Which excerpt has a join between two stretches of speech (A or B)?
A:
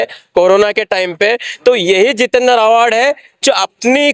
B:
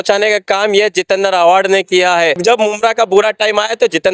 B